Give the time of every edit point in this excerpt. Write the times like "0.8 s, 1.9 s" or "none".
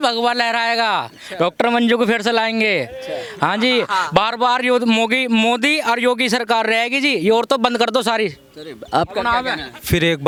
none